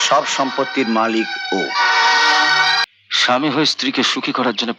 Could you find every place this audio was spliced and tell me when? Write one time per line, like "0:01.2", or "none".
0:02.8